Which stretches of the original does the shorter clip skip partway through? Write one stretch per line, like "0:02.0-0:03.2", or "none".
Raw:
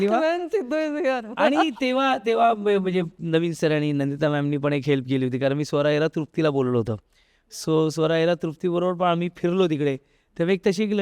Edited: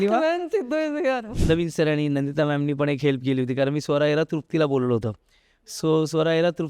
0:01.3-0:03.1